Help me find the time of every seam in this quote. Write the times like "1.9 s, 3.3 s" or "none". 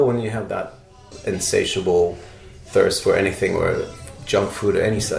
1.1 s